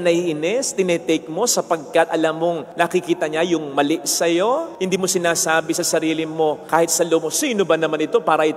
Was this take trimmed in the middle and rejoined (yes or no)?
yes